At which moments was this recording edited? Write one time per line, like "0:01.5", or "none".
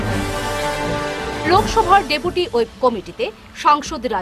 0:00.9

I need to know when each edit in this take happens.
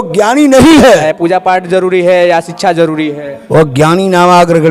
0:01.1
0:03.3

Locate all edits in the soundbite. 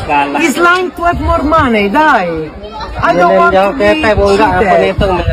none

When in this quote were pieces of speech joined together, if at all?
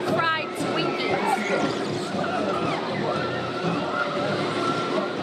none

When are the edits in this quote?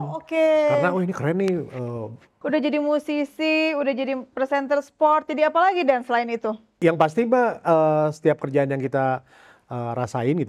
0:02.4
0:06.7

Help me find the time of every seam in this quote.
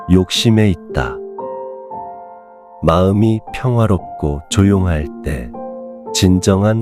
0:01.1
0:02.7

